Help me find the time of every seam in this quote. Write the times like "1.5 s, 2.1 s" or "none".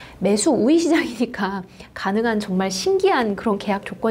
none